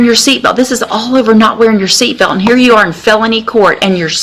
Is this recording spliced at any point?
no; 0 cuts

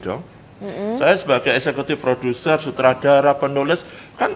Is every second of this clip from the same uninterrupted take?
yes; 0 cuts

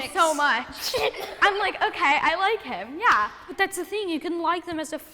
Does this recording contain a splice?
yes; 2 cuts; at 1.3 s, 3.5 s

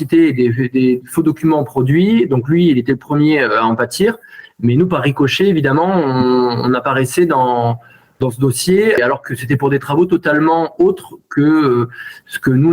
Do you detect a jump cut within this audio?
yes; 1 cut; at 9.0 s

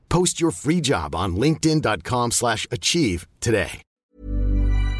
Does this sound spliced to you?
yes; 1 cut; at 3.9 s

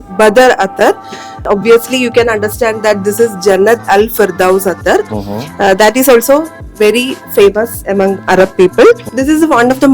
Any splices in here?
yes; 2 cuts; at 1.4 s, 9.1 s

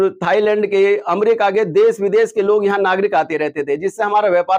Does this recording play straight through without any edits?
yes; 0 cuts

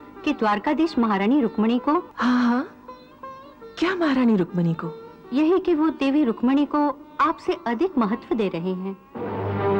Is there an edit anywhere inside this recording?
yes; 1 cut; at 2.1 s

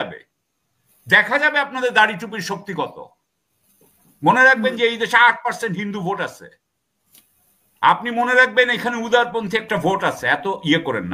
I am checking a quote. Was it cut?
no; 0 cuts

